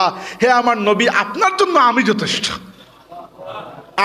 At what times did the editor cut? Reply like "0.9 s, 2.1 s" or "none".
none